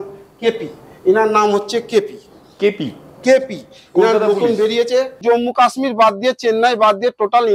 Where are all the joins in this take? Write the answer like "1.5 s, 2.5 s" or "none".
5.2 s